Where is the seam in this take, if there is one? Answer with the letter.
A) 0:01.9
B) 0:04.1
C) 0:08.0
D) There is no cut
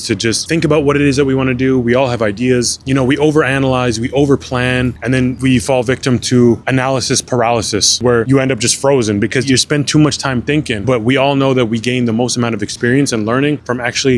C